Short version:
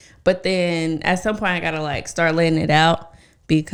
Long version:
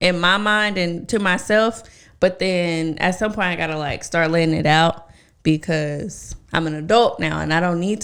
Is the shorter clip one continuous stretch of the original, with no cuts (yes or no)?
yes